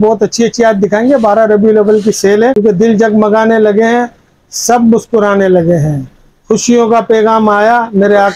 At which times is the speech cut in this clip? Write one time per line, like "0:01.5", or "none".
0:02.6